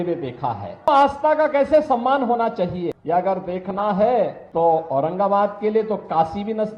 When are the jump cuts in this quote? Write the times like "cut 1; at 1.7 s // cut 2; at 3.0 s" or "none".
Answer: cut 1; at 0.9 s // cut 2; at 3.0 s // cut 3; at 4.4 s